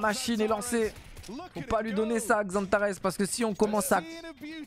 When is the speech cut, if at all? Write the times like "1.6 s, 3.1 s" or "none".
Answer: none